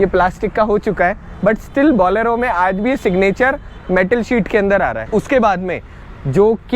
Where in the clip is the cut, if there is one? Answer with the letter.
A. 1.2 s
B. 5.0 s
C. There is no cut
B